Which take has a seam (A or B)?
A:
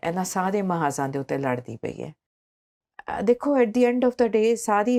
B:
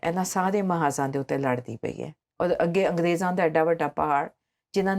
B